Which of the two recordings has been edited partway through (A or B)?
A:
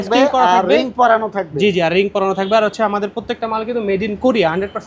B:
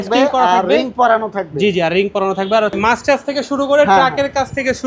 B